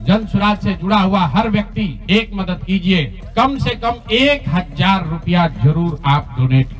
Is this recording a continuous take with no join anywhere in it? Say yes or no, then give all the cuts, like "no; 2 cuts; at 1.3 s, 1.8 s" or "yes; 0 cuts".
no; 2 cuts; at 2.0 s, 3.2 s